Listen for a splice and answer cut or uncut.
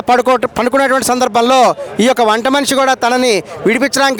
uncut